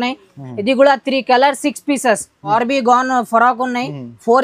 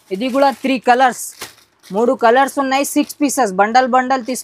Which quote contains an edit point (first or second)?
first